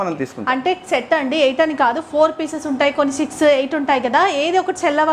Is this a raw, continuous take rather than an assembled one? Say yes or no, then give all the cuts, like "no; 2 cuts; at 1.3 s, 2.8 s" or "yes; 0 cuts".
yes; 0 cuts